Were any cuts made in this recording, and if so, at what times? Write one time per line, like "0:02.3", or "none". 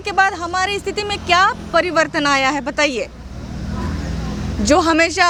none